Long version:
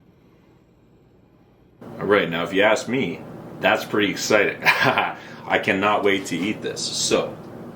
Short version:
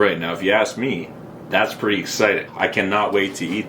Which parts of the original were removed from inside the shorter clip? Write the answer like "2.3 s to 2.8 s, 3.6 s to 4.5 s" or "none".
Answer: 4.6 s to 5.4 s